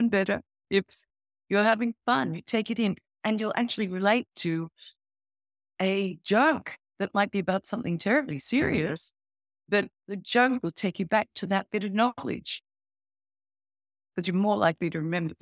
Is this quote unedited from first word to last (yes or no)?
yes